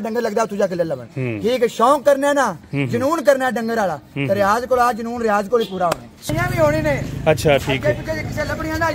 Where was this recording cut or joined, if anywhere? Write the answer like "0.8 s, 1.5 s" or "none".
6.3 s